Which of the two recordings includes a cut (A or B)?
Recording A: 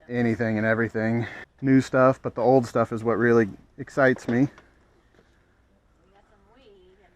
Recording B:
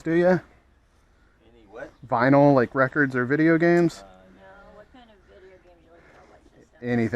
A